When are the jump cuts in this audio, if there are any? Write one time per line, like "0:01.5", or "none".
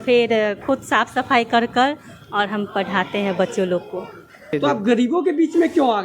0:04.5